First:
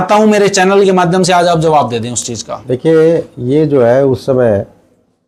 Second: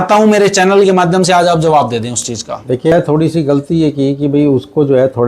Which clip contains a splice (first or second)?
second